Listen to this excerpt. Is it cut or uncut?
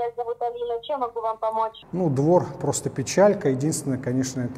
cut